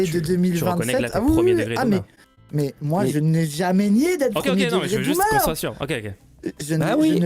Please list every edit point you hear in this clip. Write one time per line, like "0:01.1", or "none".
none